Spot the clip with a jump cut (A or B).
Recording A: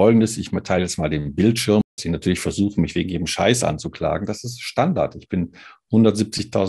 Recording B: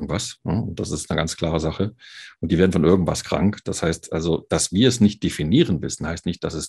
A